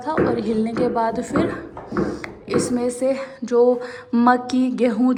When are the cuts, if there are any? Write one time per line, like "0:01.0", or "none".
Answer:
none